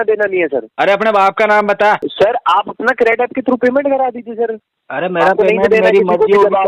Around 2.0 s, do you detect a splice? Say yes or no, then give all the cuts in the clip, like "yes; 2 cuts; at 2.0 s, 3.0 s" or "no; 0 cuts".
yes; 1 cut; at 2.0 s